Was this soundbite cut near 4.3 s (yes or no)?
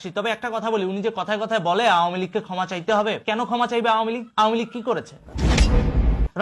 no